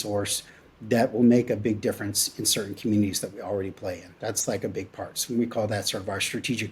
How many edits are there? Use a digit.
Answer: 0